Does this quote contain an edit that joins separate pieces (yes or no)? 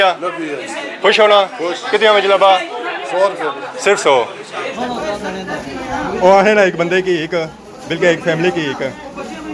yes